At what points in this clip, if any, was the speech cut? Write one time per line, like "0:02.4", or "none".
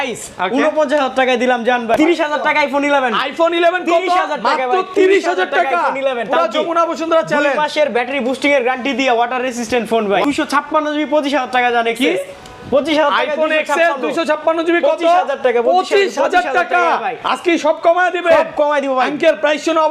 0:01.9
0:10.2